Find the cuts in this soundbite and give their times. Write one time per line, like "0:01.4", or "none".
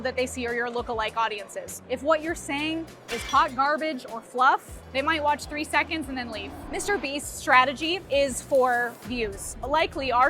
0:01.8
0:04.9
0:06.5